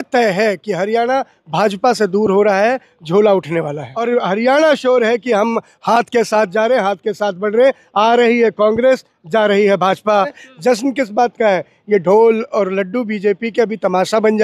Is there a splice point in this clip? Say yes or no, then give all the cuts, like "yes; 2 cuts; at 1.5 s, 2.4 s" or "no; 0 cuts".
yes; 2 cuts; at 3.9 s, 10.4 s